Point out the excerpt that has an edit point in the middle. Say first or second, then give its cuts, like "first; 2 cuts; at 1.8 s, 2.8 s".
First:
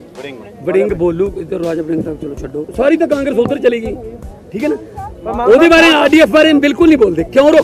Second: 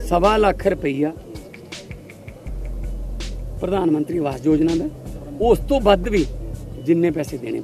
first; 1 cut; at 2.7 s